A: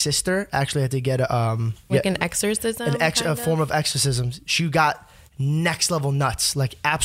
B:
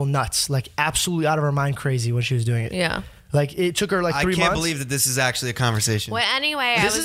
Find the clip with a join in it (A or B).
A